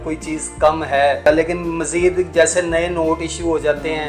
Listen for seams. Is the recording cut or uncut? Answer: cut